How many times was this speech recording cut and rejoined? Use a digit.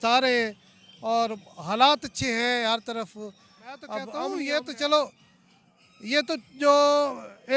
1